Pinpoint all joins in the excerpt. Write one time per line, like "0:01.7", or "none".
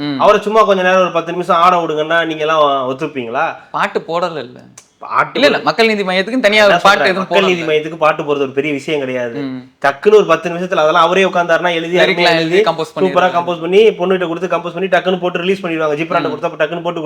none